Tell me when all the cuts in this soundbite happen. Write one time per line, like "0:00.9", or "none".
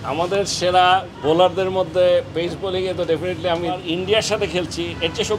0:01.1
0:03.8